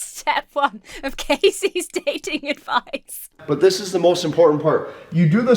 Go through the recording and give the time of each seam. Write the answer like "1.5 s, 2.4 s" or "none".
3.4 s